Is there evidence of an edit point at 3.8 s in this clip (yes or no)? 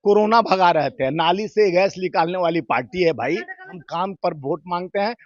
yes